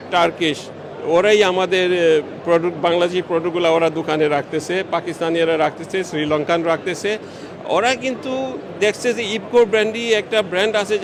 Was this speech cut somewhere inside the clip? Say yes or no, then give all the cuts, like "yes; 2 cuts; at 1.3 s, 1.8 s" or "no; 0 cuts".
no; 0 cuts